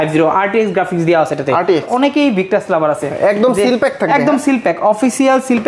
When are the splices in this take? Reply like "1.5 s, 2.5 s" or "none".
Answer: 1.9 s